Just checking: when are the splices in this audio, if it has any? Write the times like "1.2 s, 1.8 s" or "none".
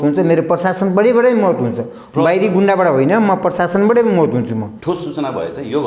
4.7 s